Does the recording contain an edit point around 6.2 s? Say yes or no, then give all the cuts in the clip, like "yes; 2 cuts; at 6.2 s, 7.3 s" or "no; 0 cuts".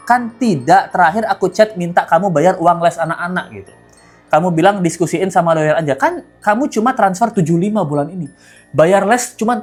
no; 0 cuts